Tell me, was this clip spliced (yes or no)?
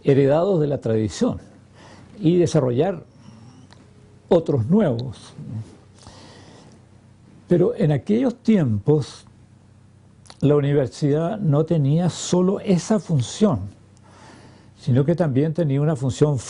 yes